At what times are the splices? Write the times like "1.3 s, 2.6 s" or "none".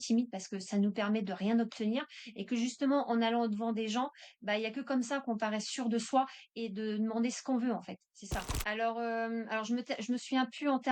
8.6 s